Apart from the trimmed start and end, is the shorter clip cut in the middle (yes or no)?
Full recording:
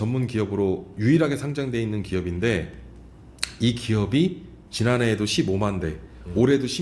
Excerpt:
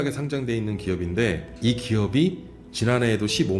yes